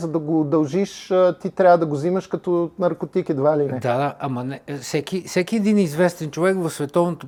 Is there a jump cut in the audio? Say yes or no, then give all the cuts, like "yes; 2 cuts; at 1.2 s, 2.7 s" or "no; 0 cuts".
no; 0 cuts